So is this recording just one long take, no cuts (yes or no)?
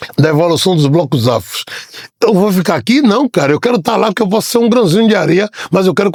yes